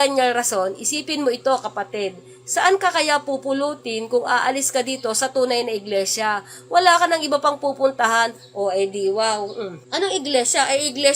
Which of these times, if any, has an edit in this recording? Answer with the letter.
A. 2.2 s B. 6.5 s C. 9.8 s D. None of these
C